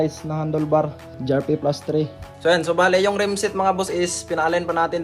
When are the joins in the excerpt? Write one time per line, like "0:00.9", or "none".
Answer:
0:01.2
0:02.2